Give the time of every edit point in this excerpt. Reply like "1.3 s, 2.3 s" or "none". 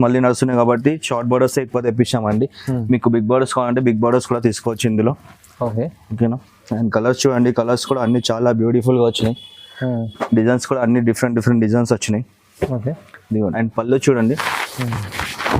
13.5 s